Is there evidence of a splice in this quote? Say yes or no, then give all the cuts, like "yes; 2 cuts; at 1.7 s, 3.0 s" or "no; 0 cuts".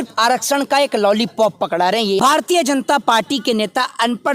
yes; 1 cut; at 2.2 s